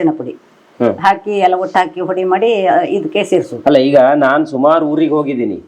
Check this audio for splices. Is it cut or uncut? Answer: uncut